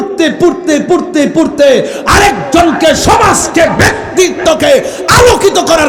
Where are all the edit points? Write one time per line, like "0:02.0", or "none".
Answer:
none